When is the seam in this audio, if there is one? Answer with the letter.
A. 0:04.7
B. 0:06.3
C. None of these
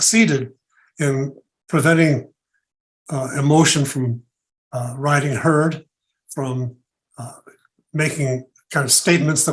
C